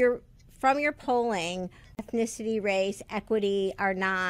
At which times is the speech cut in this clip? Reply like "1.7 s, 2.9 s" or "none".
2.0 s